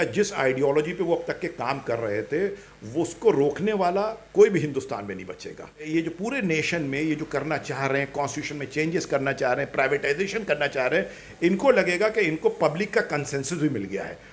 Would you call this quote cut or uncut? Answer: cut